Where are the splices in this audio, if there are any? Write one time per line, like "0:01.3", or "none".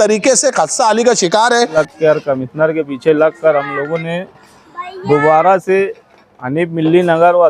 0:01.7